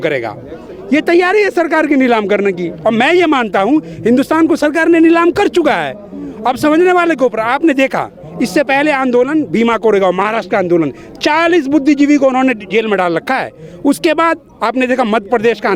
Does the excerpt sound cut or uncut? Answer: uncut